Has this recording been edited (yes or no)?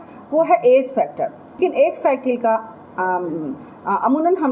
yes